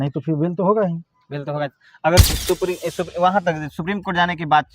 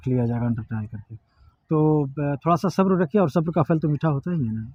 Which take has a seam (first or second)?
first